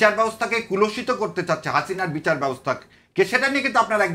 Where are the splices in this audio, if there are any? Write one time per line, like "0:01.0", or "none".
none